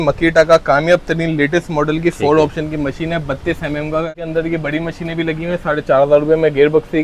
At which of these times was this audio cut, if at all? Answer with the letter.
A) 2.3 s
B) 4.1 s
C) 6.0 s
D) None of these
B